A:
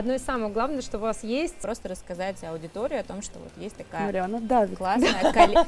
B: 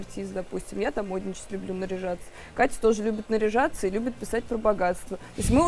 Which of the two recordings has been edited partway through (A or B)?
A